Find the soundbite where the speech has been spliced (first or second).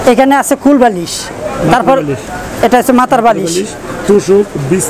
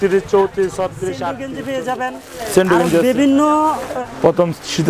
second